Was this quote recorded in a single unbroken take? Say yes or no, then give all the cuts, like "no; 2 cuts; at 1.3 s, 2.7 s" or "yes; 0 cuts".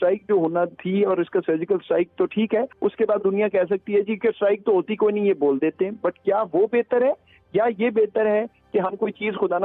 no; 1 cut; at 2.7 s